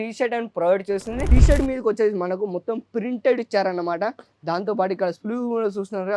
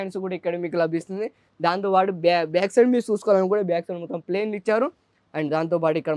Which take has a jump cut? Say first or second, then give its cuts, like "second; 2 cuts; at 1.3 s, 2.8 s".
first; 1 cut; at 1.2 s